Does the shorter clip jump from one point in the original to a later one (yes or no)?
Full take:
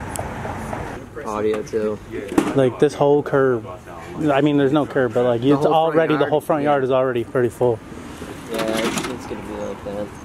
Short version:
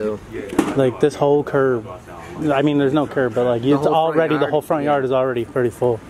no